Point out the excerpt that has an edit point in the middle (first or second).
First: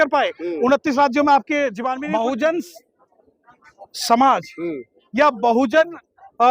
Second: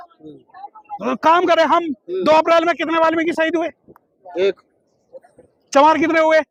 first